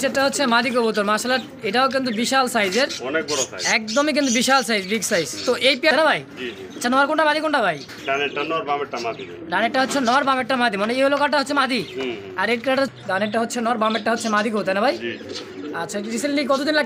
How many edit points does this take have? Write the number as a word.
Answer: two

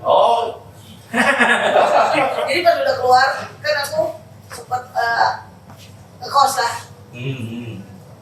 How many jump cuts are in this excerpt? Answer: one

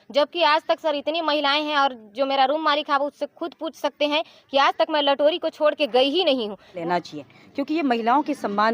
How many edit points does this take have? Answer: one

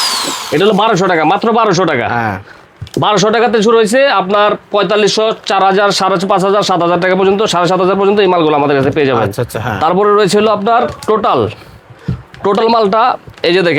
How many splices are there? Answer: zero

